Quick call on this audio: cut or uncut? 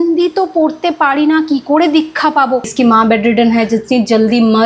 cut